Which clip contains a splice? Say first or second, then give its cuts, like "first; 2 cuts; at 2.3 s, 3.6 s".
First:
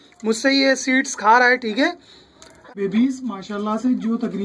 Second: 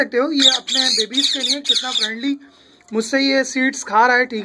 first; 1 cut; at 2.7 s